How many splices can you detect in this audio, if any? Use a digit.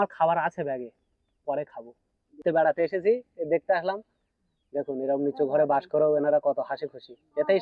1